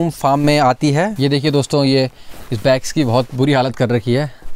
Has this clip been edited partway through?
yes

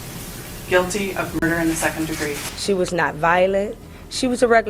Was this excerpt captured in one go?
no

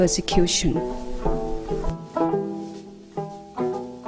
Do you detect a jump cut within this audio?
no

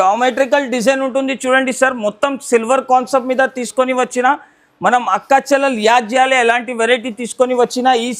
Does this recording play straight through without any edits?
yes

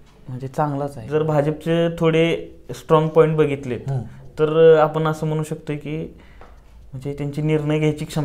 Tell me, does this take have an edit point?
yes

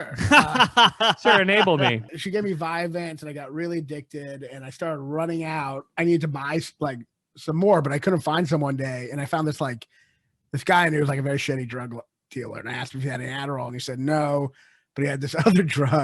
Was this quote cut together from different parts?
yes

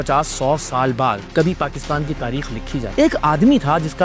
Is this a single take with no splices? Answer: no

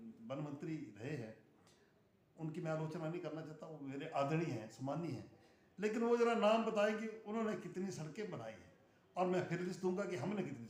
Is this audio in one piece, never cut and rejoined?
yes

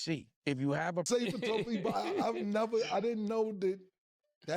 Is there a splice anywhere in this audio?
yes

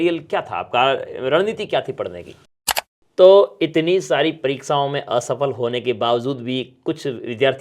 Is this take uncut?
no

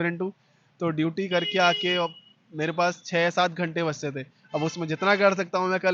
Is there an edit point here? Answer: no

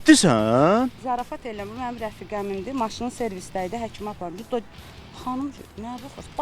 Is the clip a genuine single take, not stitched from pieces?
yes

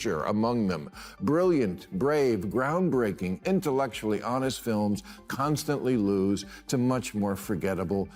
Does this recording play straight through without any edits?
yes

